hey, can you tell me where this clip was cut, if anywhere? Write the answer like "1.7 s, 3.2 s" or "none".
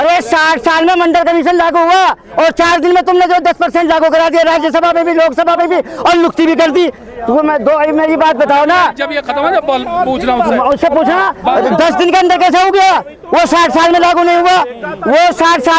none